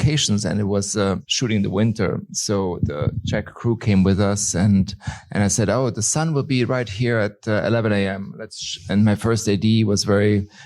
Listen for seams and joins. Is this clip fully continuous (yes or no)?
no